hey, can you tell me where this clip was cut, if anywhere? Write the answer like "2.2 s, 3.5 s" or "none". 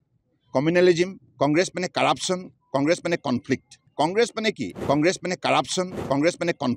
3.9 s, 4.7 s, 6.0 s